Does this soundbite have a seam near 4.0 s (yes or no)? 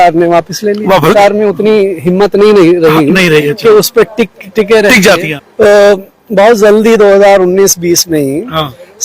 no